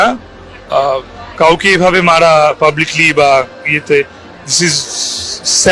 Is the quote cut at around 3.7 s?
no; 0 cuts

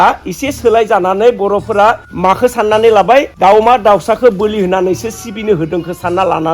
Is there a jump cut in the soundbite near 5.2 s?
no; 2 cuts; at 2.1 s, 3.3 s

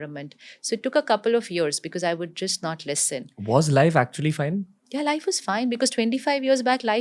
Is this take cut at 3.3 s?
no; 0 cuts

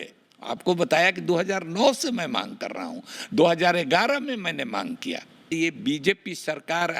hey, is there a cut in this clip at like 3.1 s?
no; 1 cut; at 5.4 s

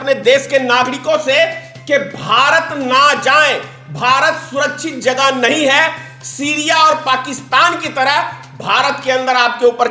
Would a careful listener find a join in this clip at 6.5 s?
no; 0 cuts

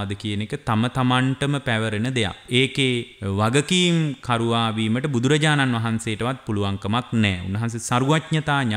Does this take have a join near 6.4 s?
no; 2 cuts; at 2.4 s, 3.1 s

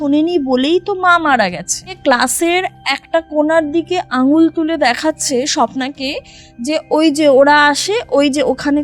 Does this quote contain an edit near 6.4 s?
no; 1 cut; at 2.0 s

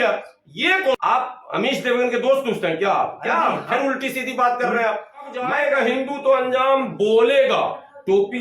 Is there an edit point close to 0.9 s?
yes; 2 cuts; at 0.9 s, 5.4 s

